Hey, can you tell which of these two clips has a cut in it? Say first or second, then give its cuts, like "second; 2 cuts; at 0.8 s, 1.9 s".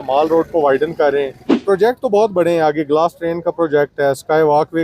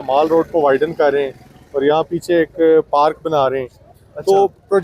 first; 1 cut; at 1.6 s